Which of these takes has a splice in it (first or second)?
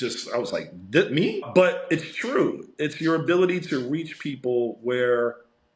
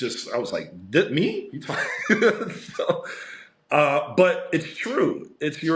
first